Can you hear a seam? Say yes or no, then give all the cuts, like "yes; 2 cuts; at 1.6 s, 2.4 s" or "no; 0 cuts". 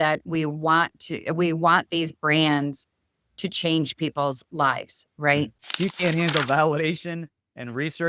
yes; 1 cut; at 5.6 s